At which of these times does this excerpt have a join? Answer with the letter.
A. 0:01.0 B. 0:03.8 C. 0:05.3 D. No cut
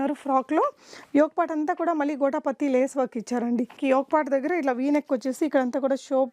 B